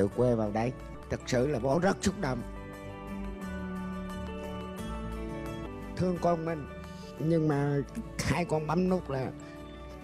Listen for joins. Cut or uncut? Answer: cut